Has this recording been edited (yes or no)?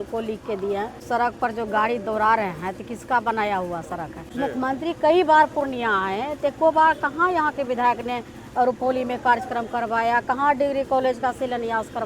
yes